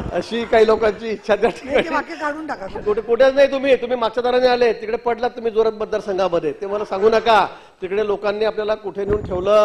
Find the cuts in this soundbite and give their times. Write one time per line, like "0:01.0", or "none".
0:02.7